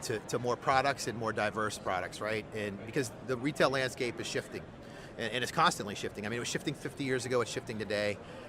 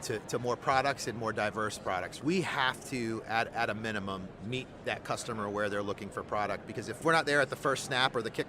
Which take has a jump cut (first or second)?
second